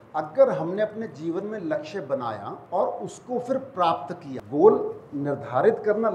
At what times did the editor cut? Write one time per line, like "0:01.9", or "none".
0:02.5
0:04.3